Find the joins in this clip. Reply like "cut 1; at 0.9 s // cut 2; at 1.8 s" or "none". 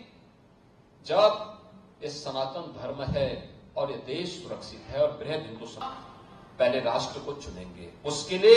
cut 1; at 5.8 s